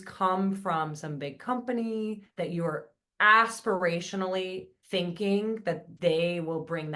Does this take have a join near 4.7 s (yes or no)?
yes